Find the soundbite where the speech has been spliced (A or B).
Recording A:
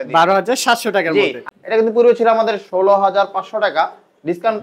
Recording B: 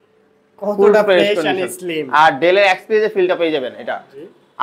A